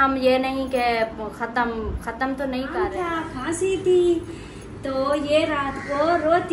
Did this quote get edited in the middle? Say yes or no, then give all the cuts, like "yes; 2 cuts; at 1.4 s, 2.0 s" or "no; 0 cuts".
yes; 1 cut; at 2.8 s